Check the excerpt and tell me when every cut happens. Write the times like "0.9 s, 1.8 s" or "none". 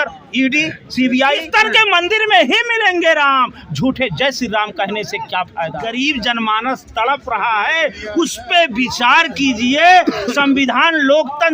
1.5 s, 5.8 s

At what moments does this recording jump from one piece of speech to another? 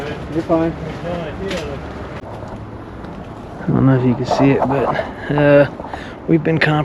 2.2 s

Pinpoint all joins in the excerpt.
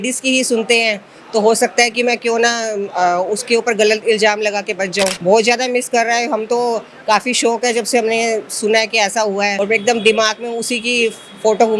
5.2 s, 9.5 s

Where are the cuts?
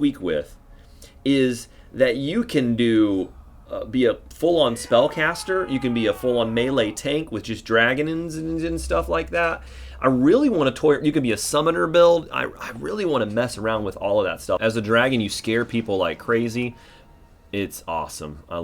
14.6 s

